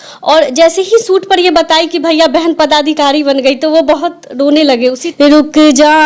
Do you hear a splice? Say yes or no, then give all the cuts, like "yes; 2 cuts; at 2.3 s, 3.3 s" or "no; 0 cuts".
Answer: yes; 1 cut; at 5.0 s